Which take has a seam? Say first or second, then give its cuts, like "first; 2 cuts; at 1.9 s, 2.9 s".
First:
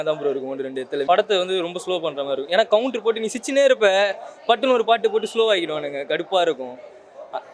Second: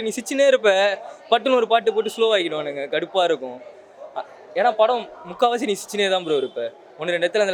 first; 1 cut; at 1.1 s